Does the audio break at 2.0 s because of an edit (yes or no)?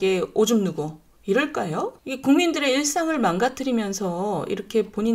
yes